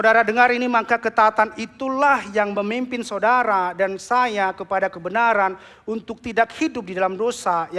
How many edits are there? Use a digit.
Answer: 0